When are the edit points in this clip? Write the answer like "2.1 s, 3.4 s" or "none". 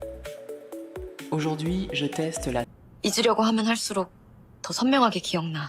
2.7 s